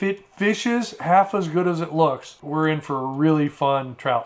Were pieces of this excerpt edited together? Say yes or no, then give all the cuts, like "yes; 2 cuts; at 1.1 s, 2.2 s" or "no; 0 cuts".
no; 0 cuts